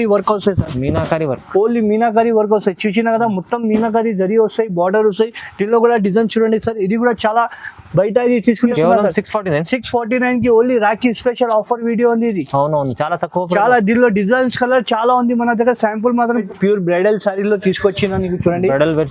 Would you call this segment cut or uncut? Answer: cut